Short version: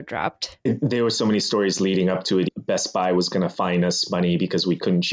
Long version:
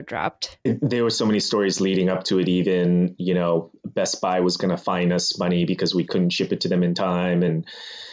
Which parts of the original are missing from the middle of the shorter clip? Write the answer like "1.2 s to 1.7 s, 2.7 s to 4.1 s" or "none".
2.5 s to 3.8 s